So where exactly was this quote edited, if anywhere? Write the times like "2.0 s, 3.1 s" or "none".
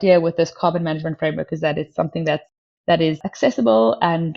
2.5 s, 3.2 s